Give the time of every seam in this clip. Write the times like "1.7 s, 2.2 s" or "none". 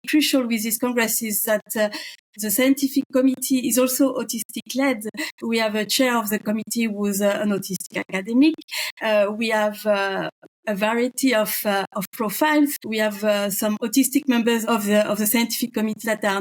none